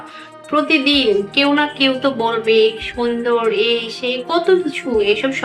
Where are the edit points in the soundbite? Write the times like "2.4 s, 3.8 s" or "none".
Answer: none

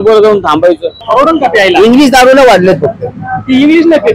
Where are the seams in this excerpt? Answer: 0.9 s

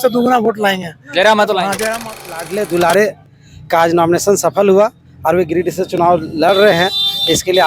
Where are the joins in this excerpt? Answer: 2.4 s

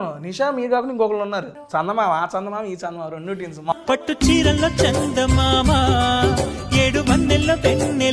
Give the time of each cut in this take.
1.6 s, 3.7 s

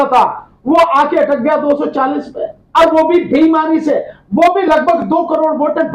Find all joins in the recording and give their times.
none

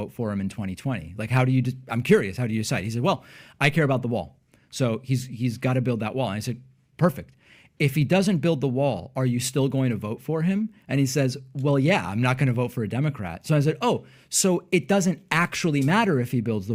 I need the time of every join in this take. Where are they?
none

